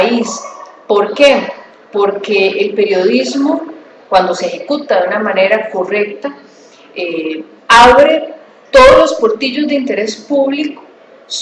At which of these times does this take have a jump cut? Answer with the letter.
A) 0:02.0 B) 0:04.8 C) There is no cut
A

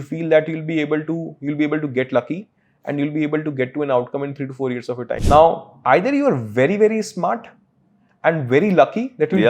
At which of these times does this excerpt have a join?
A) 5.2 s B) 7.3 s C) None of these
A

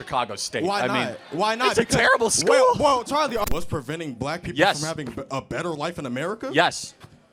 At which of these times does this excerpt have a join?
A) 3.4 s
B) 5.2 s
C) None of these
A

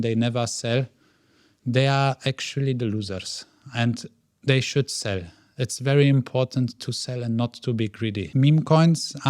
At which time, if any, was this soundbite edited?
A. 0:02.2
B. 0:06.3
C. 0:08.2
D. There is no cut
C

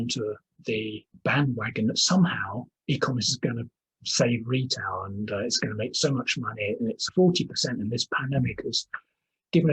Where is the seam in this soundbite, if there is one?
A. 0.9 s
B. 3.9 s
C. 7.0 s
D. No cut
C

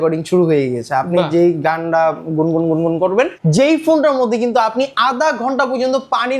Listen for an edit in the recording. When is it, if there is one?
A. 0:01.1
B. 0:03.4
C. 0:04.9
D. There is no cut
B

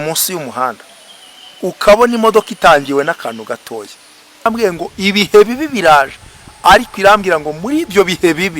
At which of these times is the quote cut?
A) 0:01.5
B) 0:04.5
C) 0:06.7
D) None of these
B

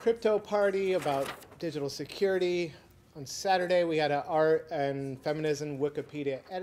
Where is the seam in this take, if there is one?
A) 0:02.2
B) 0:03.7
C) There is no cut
C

